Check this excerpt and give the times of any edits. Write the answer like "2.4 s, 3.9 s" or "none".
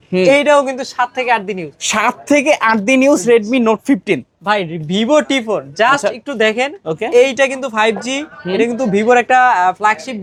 none